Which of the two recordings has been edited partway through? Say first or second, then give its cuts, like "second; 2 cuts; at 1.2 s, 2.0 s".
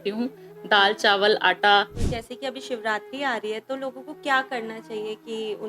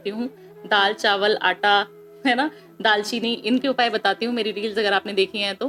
first; 1 cut; at 2.0 s